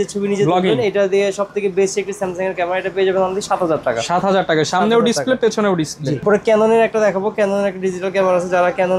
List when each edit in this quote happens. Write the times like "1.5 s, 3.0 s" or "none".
none